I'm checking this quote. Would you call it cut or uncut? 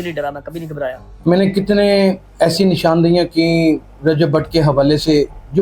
cut